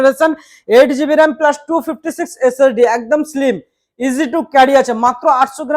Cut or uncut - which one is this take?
uncut